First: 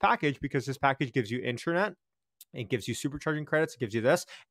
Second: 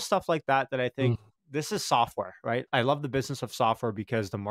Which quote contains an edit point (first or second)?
second